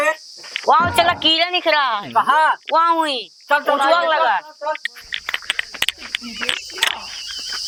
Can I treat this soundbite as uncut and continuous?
yes; 0 cuts

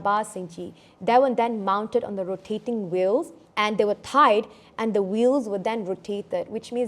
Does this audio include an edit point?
yes; 1 cut; at 3.4 s

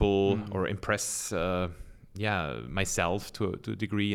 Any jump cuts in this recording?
no; 0 cuts

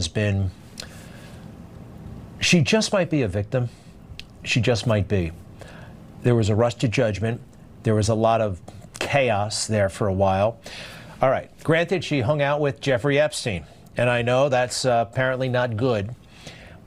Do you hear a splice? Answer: no; 0 cuts

